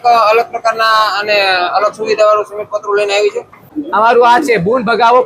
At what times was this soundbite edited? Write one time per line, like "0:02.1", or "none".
0:03.7